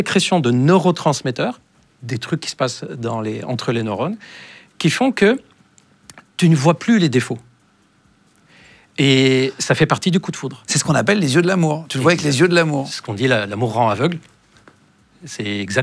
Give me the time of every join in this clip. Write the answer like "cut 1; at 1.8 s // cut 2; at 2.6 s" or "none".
none